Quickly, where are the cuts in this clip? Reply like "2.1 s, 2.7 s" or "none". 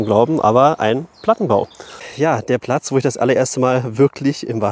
2.0 s